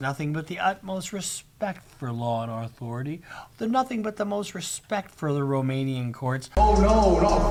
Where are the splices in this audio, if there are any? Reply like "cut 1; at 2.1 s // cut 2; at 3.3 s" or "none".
none